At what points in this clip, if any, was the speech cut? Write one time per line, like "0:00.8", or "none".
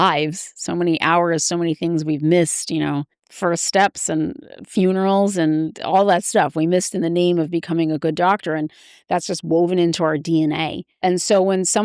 0:03.2
0:11.0